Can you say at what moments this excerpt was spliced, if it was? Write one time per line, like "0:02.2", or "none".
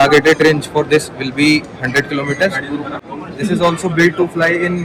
0:03.0